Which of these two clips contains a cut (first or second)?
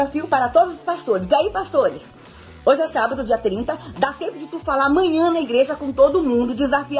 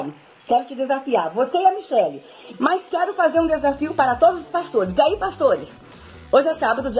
second